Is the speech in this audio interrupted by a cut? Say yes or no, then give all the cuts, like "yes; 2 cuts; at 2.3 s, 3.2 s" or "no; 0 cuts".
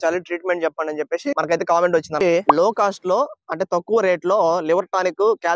yes; 1 cut; at 2.2 s